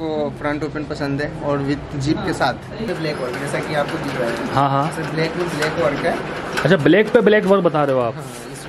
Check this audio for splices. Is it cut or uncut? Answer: cut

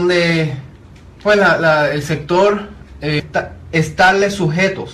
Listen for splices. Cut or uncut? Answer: uncut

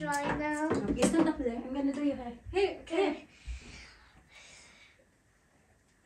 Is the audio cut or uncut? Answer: uncut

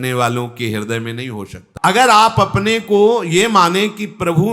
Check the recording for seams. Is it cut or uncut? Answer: cut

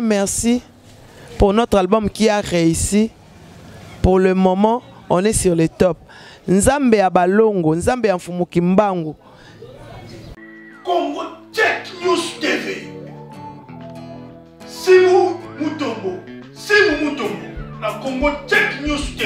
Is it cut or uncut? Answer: cut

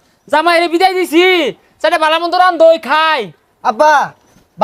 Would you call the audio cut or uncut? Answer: uncut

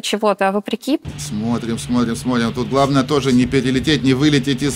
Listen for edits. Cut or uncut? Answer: cut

